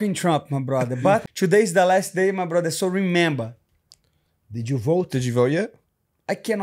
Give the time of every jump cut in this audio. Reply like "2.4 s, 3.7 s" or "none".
1.2 s